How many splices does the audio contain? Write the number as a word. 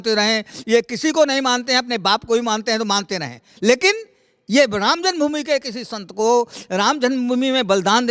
zero